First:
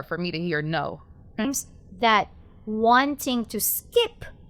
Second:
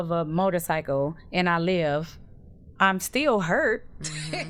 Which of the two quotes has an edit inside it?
first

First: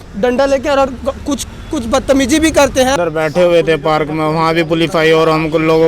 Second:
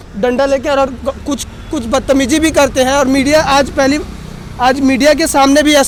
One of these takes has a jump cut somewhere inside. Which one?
first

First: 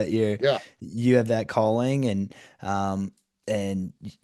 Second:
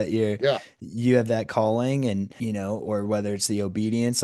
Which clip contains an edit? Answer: second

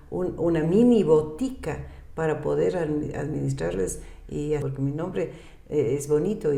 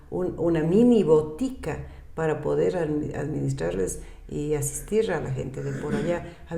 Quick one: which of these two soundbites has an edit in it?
first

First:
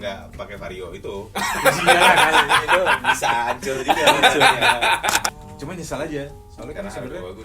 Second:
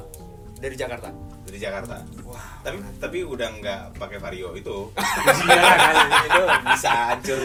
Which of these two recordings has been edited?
first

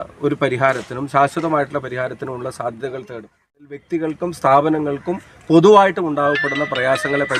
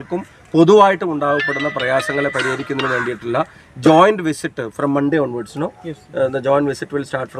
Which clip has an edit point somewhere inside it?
first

